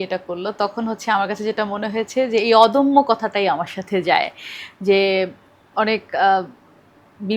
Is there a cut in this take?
no; 0 cuts

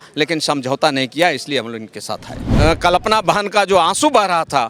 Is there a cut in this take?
yes; 1 cut; at 2.4 s

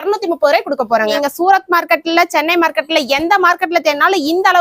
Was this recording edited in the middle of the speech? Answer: yes; 1 cut; at 1.1 s

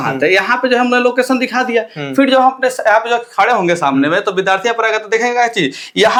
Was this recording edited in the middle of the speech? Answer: no; 0 cuts

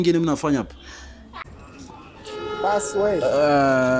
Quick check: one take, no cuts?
no; 1 cut; at 1.4 s

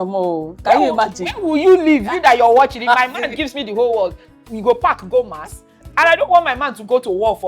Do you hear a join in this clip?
yes; 1 cut; at 5.7 s

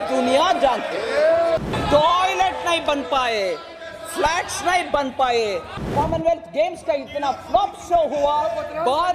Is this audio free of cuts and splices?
no; 2 cuts; at 1.7 s, 5.9 s

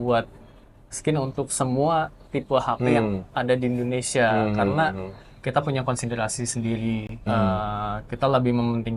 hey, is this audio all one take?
yes; 0 cuts

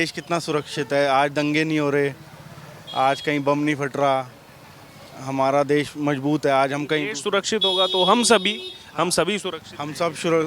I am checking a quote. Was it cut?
no; 0 cuts

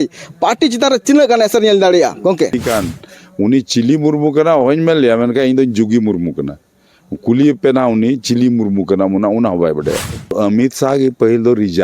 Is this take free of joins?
no; 2 cuts; at 2.5 s, 10.3 s

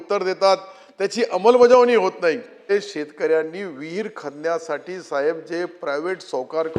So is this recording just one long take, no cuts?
no; 1 cut; at 2.6 s

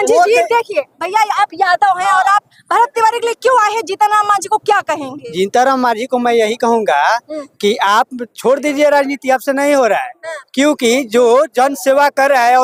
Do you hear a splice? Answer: no; 0 cuts

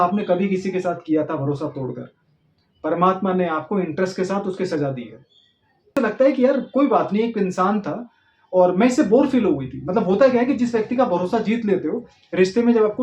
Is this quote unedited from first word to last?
no; 1 cut; at 5.9 s

